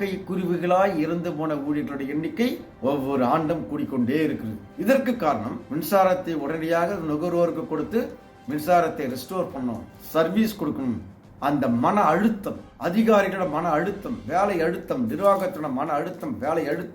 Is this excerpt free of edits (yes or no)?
yes